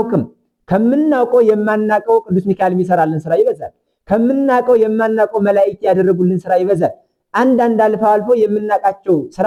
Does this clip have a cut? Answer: no; 0 cuts

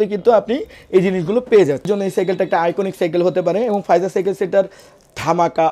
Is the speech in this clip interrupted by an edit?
yes; 1 cut; at 1.9 s

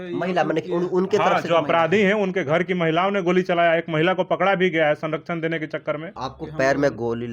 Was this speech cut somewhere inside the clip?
yes; 1 cut; at 6.1 s

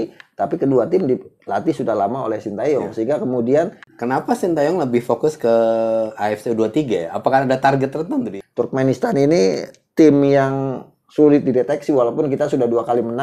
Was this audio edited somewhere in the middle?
yes; 2 cuts; at 3.8 s, 8.3 s

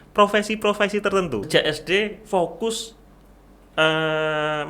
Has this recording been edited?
yes; 1 cut; at 1.4 s

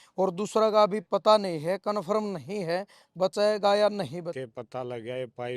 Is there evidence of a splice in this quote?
yes; 1 cut; at 4.3 s

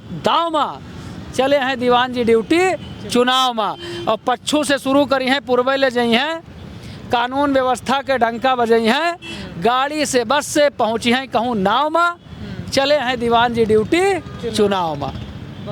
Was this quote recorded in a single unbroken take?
yes; 0 cuts

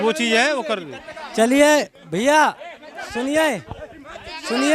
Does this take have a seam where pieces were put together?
no; 0 cuts

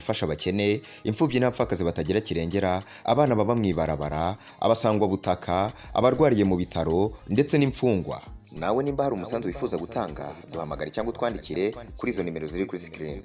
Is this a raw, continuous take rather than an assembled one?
yes; 0 cuts

